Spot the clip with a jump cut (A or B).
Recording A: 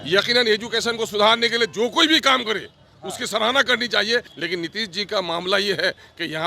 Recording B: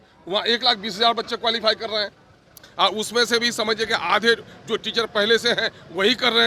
A